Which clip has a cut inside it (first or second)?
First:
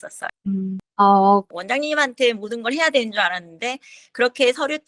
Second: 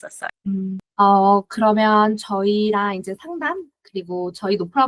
first